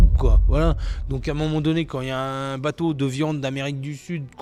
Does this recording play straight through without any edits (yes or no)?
yes